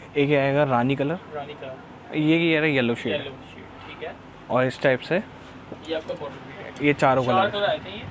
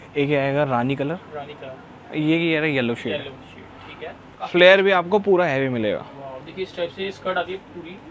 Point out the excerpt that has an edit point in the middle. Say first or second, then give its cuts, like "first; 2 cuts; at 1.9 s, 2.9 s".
second; 1 cut; at 4.4 s